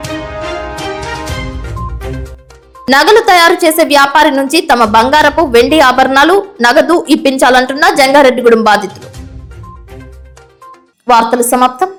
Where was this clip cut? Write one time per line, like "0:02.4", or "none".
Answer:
none